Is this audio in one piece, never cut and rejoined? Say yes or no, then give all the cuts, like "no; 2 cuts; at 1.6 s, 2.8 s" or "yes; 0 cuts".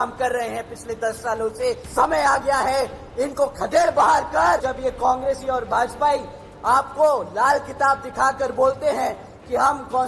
no; 2 cuts; at 1.8 s, 4.6 s